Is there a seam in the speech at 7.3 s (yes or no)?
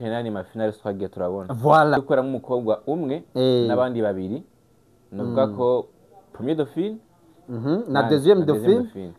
no